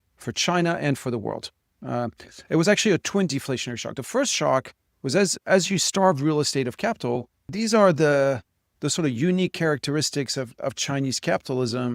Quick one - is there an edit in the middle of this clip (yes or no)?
yes